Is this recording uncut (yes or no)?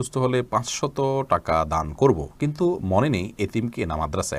yes